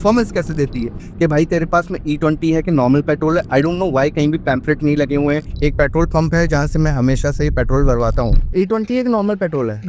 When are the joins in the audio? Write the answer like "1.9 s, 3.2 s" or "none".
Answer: 1.0 s, 5.5 s, 8.4 s